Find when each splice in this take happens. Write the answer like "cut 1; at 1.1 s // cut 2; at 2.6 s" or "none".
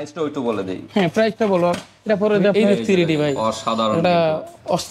cut 1; at 2.5 s